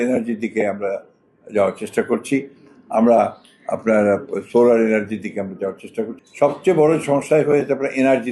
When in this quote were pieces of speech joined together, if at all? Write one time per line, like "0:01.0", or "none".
0:06.1